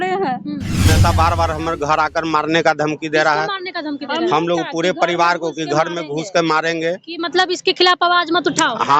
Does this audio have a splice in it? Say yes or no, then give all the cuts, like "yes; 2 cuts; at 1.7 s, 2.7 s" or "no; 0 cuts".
yes; 1 cut; at 0.9 s